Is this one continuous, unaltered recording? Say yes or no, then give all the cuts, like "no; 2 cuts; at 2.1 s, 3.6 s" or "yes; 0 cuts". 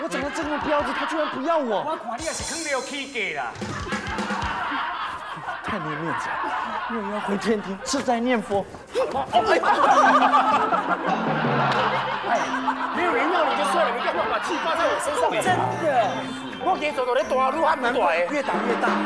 yes; 0 cuts